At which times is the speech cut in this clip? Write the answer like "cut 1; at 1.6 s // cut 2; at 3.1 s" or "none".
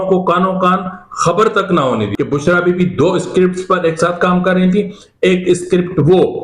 cut 1; at 2.1 s

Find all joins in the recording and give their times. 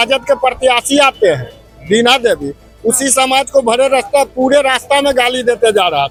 none

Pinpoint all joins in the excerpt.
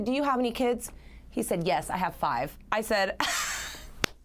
none

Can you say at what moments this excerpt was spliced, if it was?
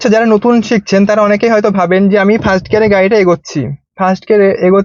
none

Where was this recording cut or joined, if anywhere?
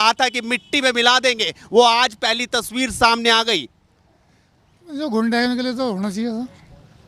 none

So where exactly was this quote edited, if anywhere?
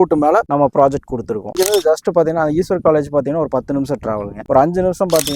cut 1; at 1.4 s

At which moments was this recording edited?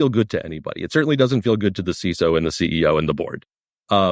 none

